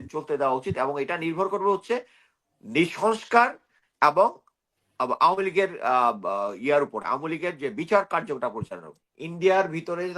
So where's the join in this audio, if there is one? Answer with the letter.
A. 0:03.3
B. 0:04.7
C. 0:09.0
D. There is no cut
C